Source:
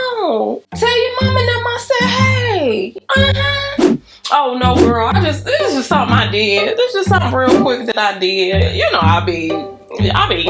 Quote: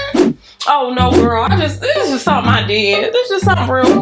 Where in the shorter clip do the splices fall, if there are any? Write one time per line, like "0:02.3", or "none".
none